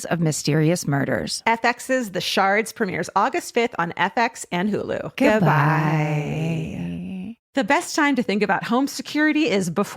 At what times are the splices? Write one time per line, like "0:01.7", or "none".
0:07.4